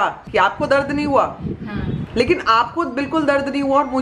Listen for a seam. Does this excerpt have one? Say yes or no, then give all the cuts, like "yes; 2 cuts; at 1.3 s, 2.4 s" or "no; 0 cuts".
no; 0 cuts